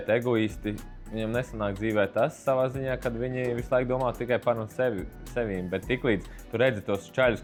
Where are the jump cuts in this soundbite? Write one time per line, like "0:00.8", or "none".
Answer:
none